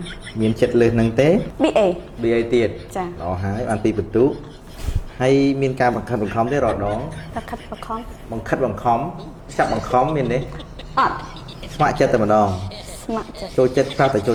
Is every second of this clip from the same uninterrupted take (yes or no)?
yes